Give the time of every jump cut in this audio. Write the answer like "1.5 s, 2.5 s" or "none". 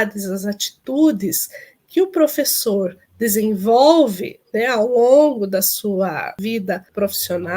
6.4 s